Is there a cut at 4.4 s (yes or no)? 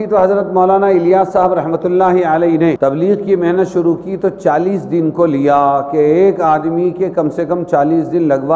no